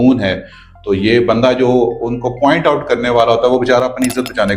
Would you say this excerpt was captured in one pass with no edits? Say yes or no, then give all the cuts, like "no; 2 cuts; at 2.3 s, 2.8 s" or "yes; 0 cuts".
yes; 0 cuts